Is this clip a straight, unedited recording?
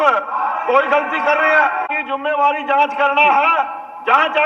no; 1 cut; at 1.9 s

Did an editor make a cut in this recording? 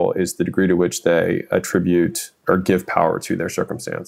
yes; 1 cut; at 2.3 s

